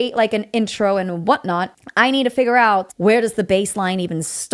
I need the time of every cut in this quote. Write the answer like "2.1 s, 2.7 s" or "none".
1.8 s, 2.9 s